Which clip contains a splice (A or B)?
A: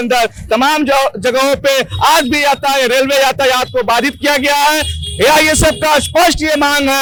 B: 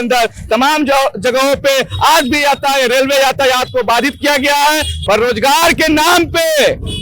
B